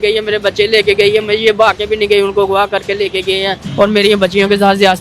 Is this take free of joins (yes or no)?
no